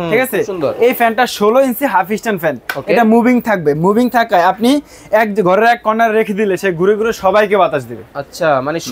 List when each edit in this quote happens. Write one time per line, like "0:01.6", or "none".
none